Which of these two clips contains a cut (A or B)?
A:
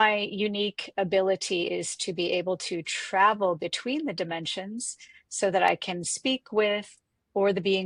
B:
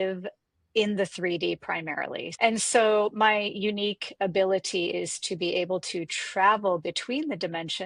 B